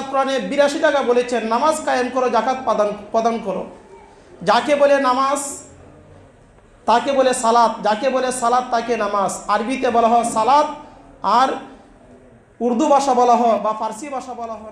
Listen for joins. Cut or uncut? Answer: uncut